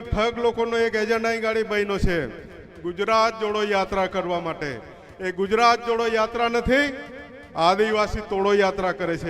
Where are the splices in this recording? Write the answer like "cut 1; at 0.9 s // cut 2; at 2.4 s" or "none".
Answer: none